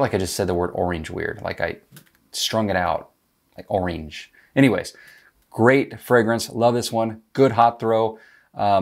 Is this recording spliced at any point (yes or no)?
no